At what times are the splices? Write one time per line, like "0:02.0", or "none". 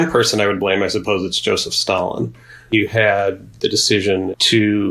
none